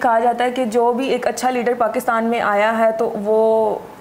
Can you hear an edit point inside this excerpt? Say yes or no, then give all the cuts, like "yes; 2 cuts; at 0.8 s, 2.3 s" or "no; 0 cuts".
no; 0 cuts